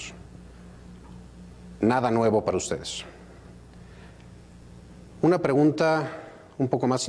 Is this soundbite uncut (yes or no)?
yes